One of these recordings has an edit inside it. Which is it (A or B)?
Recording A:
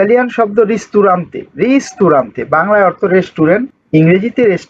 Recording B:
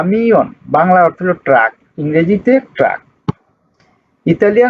A